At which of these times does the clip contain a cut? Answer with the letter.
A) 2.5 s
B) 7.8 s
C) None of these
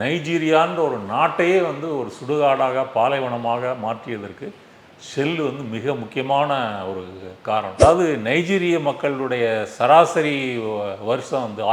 B